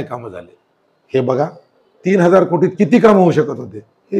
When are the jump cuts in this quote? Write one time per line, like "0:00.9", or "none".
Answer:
none